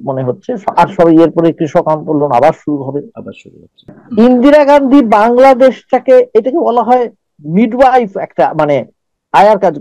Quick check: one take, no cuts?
no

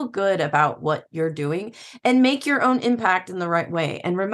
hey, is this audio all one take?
yes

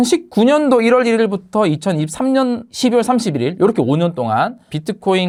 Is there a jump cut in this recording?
no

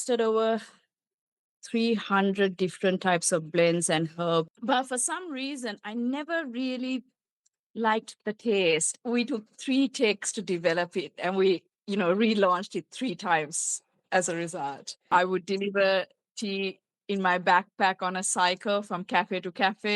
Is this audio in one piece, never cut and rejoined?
no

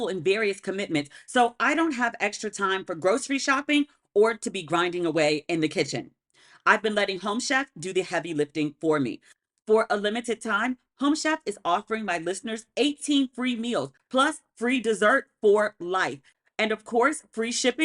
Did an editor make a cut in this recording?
yes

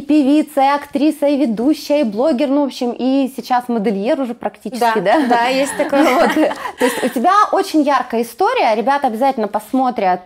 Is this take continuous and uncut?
yes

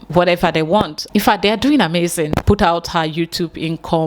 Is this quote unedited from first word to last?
no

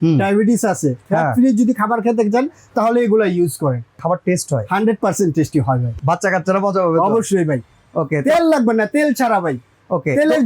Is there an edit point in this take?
yes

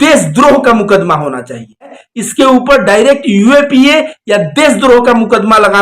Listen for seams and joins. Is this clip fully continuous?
no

